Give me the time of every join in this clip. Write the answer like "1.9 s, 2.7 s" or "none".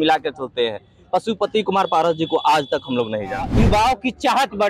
3.5 s